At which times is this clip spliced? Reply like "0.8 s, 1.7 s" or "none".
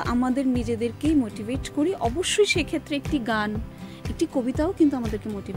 none